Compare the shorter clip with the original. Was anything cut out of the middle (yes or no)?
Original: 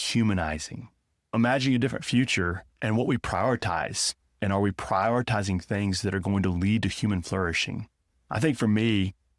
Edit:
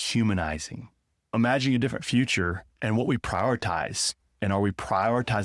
no